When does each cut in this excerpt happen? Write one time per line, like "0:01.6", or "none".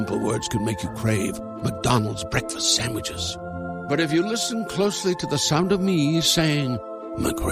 none